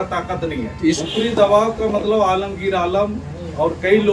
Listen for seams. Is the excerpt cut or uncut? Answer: cut